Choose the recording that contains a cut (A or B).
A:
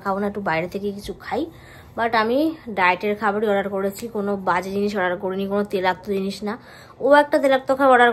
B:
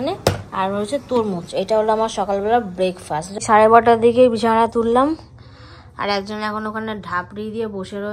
B